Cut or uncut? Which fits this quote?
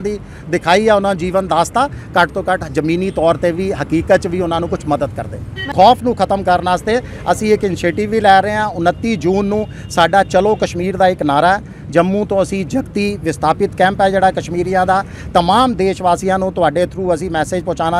cut